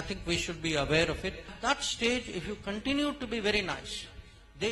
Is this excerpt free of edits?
no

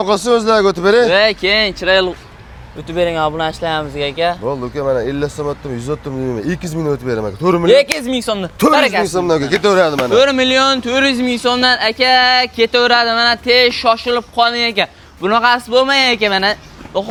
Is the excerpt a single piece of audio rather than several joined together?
yes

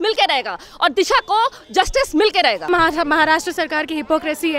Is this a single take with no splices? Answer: no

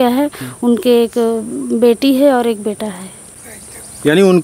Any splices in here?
no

